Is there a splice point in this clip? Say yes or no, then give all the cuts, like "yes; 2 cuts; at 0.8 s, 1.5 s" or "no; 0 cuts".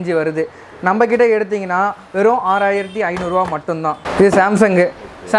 yes; 1 cut; at 4.0 s